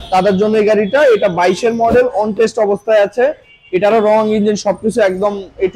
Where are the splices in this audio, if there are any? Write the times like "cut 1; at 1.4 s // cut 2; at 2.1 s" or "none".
none